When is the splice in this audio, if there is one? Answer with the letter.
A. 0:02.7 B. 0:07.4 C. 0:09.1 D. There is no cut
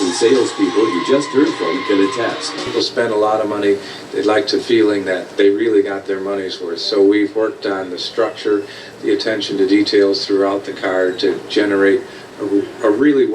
A